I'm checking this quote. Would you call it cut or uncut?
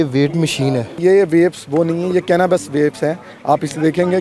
cut